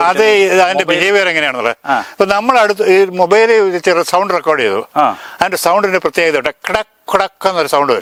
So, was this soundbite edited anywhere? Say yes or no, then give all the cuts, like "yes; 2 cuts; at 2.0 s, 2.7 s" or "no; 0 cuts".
no; 0 cuts